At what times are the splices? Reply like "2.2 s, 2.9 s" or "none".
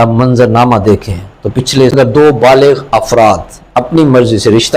1.9 s